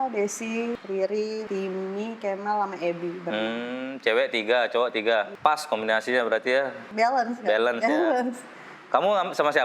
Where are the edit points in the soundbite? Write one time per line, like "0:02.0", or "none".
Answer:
0:00.8
0:01.4
0:05.3
0:06.8